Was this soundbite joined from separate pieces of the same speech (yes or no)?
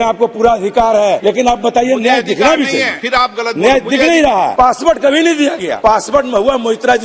yes